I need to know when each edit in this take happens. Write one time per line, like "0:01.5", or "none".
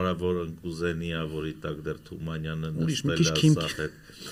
none